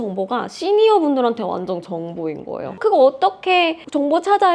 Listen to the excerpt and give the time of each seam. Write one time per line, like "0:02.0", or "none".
0:02.6

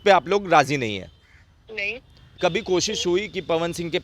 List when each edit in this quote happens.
0:02.3

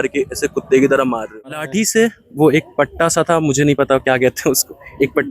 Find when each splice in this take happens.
0:01.7

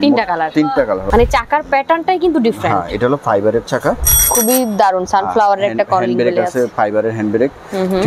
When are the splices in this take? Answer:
0:01.0
0:04.1

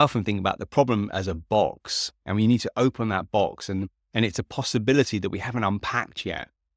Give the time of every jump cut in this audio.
none

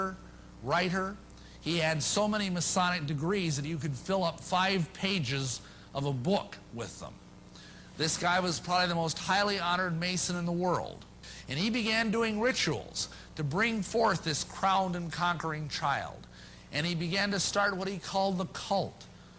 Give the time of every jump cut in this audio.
0:04.7

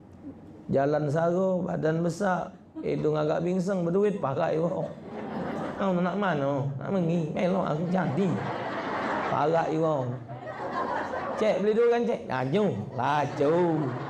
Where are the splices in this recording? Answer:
none

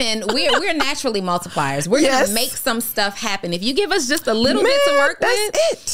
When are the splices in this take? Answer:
none

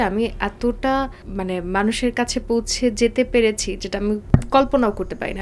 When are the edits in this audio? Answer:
0:01.2
0:04.2

